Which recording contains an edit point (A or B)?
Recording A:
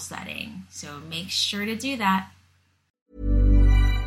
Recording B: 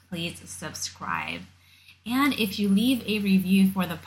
A